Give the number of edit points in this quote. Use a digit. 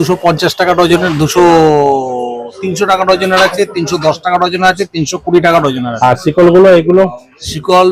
0